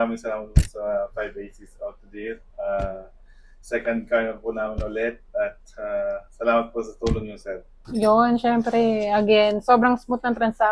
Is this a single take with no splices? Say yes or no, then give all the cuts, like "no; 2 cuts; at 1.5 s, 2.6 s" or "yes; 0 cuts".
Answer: no; 1 cut; at 7.8 s